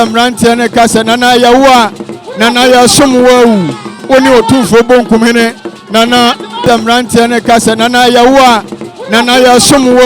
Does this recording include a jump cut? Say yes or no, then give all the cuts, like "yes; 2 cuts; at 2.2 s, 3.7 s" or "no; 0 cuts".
yes; 1 cut; at 6.6 s